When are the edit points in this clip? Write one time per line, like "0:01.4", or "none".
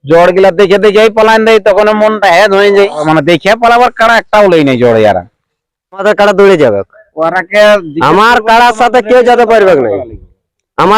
0:03.0
0:06.0

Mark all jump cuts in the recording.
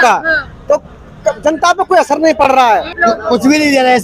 0:02.9

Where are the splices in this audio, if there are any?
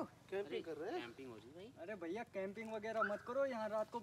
none

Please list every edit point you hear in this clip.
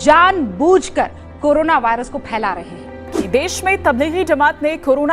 0:03.0

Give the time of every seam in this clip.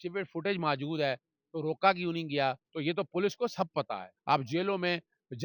0:02.7
0:04.1

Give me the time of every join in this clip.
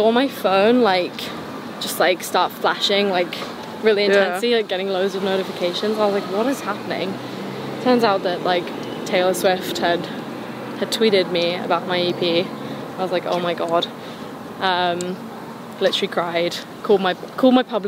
none

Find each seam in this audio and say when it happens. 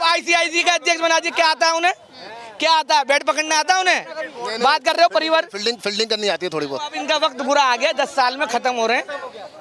0:07.0

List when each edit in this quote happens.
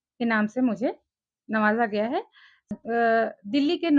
0:02.7

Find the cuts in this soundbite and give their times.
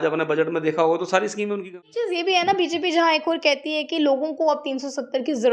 0:01.6

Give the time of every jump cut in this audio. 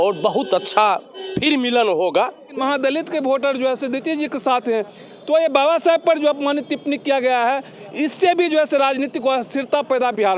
0:02.5

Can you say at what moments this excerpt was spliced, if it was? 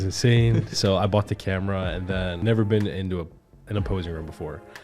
0:02.4

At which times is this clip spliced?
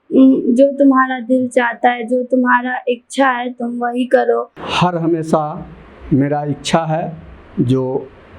0:04.6

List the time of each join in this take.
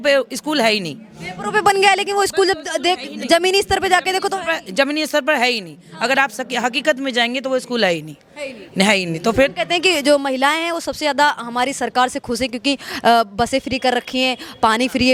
none

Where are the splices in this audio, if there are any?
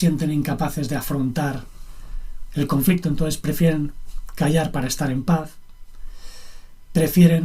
none

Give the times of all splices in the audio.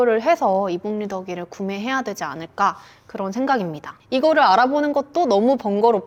none

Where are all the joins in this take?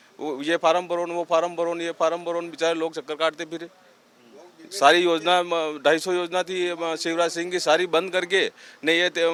none

